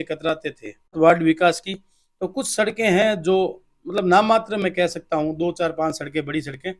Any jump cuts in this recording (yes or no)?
yes